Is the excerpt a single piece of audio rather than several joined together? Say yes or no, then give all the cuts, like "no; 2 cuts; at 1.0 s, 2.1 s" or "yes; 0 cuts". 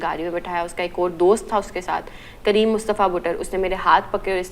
yes; 0 cuts